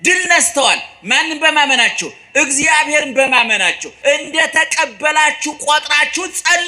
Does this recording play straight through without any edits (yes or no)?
no